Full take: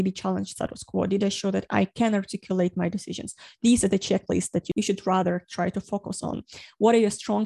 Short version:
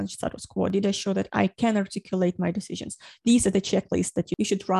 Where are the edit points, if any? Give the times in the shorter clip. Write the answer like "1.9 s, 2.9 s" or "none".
none